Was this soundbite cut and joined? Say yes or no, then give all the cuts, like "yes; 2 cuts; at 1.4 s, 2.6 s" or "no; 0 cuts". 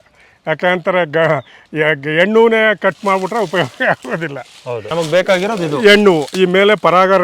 yes; 1 cut; at 4.9 s